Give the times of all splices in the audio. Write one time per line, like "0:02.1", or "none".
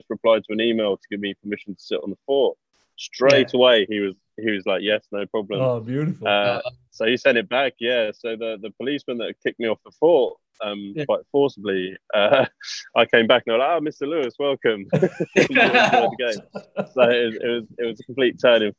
none